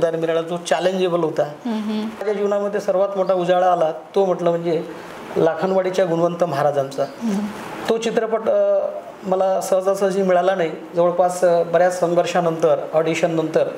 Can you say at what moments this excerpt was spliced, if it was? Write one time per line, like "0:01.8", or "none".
0:02.2